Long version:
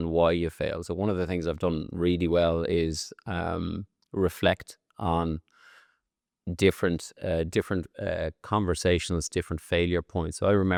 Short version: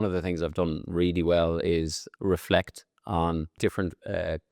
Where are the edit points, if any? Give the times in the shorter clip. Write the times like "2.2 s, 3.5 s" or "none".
2.1 s, 3.6 s

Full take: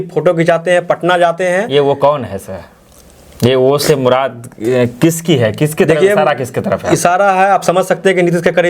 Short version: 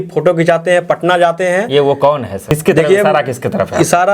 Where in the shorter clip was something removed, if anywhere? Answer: 2.5 s

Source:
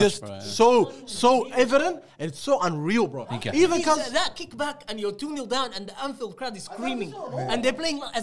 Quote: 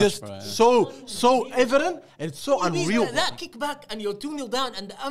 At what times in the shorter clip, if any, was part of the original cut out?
3.1 s

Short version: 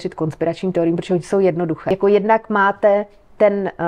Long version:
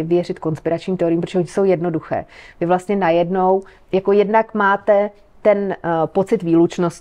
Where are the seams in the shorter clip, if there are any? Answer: 1.8 s

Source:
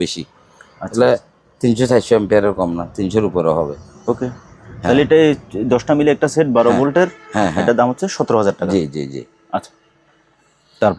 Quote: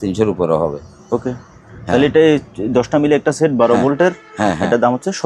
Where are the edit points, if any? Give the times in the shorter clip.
none

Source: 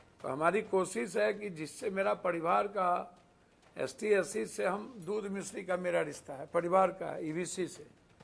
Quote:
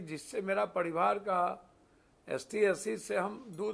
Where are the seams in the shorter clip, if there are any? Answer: none

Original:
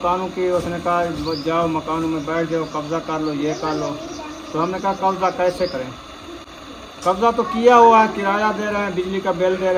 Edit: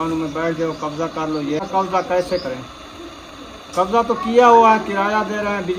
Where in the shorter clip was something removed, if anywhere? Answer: 1.7 s

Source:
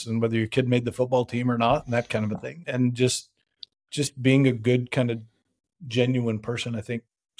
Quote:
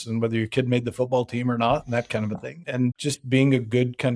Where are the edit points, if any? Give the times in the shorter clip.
2.9 s

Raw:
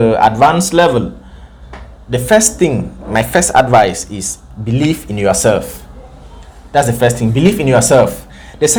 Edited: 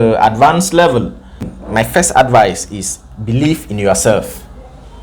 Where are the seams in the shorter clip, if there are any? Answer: 1.5 s

